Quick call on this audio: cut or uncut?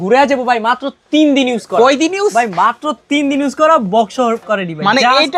uncut